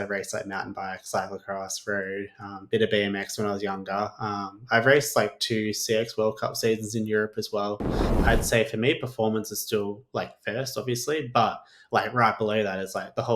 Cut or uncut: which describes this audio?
cut